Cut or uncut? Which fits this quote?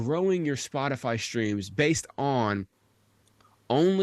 uncut